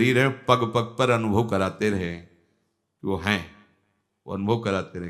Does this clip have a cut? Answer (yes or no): no